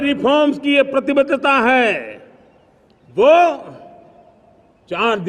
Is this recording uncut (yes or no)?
yes